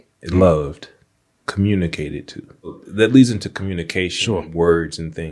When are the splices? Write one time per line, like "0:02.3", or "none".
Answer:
0:02.8